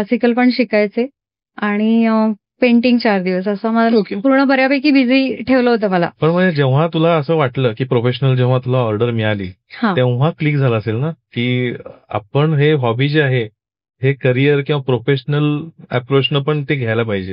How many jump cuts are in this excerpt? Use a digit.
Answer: 0